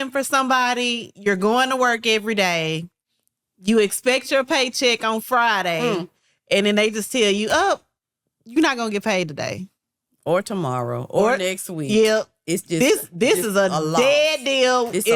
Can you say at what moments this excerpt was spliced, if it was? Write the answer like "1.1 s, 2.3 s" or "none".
none